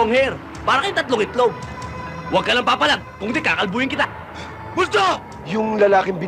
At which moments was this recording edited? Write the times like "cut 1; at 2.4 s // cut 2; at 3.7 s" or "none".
cut 1; at 5.3 s